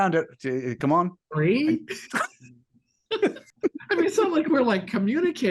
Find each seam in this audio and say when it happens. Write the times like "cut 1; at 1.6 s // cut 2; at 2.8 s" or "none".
cut 1; at 3.5 s